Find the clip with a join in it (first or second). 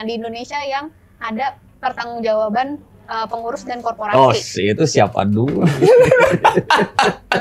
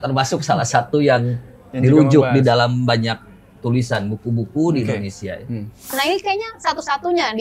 second